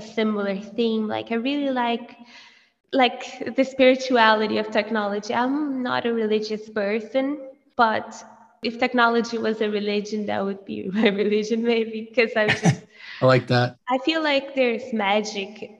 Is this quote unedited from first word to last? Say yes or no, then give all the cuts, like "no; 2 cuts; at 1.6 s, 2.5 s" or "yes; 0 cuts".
no; 3 cuts; at 7.6 s, 8.6 s, 13.8 s